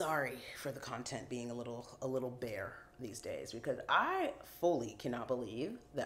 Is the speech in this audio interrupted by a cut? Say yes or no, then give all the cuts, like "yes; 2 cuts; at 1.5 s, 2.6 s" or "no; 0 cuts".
no; 0 cuts